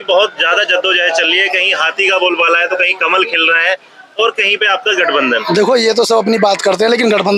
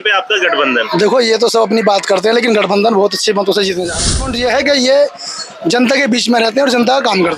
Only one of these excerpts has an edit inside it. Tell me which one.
second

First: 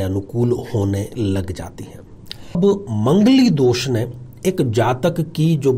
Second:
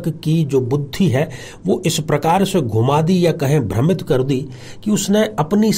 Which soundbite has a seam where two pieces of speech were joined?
first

